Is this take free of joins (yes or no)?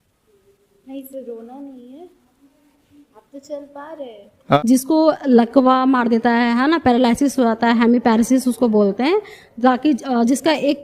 no